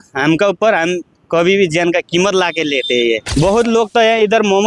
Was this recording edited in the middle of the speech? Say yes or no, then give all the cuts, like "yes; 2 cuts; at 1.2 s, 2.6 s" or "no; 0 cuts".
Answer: yes; 1 cut; at 3.3 s